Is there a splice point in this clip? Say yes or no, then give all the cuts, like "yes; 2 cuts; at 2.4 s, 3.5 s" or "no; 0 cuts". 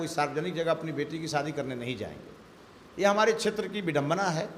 no; 0 cuts